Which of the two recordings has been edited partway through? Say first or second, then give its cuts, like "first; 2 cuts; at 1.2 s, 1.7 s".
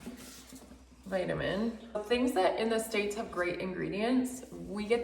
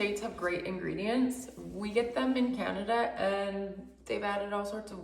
first; 1 cut; at 2.0 s